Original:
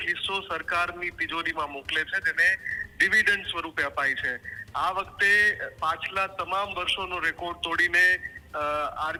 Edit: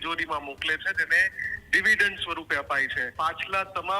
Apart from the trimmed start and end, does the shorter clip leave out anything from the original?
yes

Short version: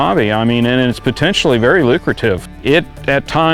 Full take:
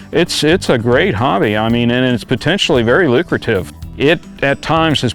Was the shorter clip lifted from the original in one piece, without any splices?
no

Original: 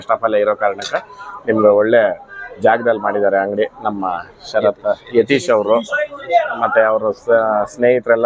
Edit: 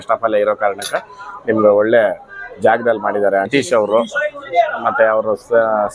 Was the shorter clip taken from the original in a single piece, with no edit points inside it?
no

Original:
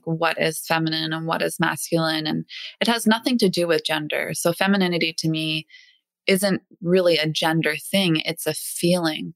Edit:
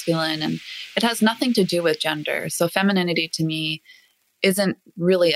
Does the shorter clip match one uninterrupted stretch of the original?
yes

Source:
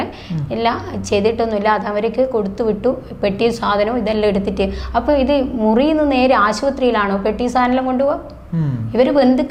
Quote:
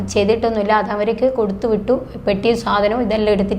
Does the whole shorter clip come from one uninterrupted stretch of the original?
yes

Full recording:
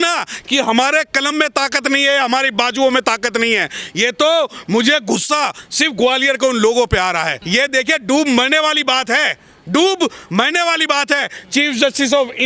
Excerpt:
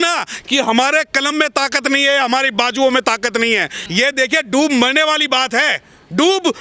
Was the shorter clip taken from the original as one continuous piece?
no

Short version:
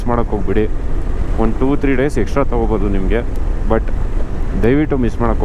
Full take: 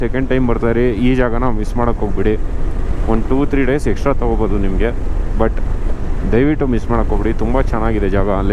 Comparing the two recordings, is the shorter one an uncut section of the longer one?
yes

